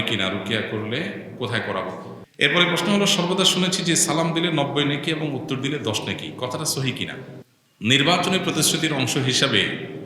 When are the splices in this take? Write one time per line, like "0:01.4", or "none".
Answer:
0:02.2
0:07.4